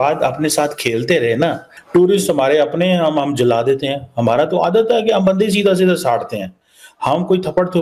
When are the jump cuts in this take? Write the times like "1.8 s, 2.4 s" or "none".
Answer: 1.7 s